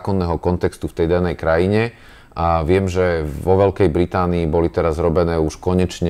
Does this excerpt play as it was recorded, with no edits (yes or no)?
yes